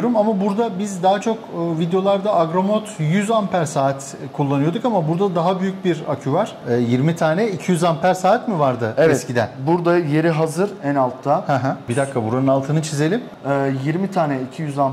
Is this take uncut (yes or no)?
no